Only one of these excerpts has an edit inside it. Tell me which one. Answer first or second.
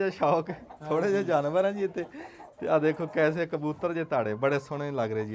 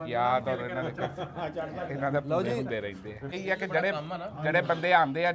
second